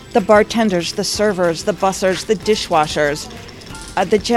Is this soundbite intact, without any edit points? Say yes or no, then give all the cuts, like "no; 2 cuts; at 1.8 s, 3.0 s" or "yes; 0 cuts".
yes; 0 cuts